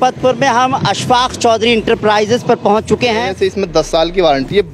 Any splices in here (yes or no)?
yes